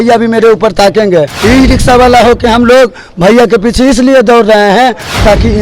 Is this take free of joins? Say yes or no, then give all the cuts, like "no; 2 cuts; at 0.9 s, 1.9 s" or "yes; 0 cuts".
no; 1 cut; at 1.3 s